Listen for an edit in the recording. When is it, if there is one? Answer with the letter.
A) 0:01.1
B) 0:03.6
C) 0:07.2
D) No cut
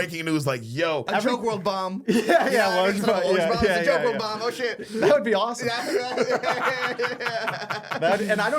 A